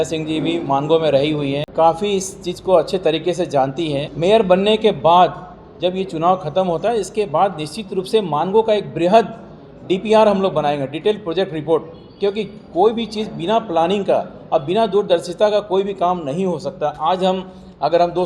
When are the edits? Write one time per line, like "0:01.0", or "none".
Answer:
0:01.6
0:04.1